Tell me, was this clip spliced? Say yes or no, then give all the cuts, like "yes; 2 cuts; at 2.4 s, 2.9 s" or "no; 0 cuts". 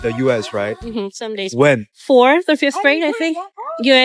no; 0 cuts